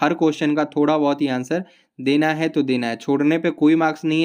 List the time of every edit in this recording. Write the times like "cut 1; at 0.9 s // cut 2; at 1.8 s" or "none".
none